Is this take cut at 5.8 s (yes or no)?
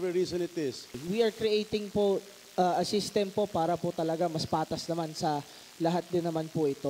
no